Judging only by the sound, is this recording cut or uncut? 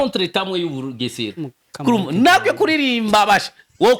uncut